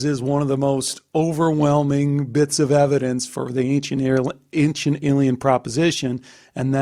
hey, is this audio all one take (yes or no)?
yes